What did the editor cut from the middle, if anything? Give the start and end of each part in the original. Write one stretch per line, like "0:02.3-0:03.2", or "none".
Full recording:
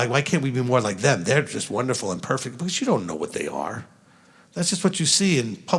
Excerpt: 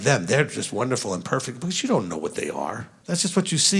0:03.9-0:04.4